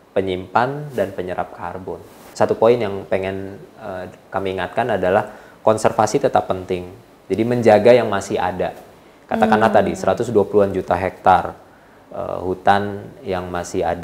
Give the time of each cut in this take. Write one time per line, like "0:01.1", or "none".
0:02.2